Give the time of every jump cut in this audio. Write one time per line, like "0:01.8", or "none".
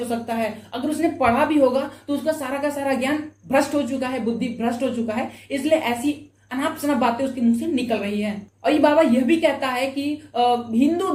none